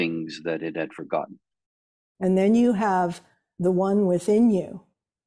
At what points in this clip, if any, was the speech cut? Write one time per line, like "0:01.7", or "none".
0:01.4